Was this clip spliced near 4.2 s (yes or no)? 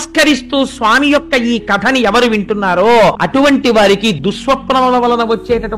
yes